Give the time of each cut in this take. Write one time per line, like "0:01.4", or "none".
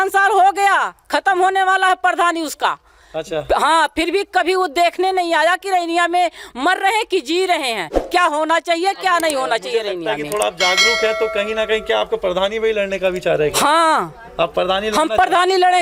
none